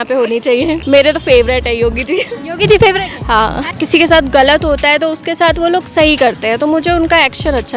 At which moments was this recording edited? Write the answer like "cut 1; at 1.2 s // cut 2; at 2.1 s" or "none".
cut 1; at 0.8 s // cut 2; at 3.7 s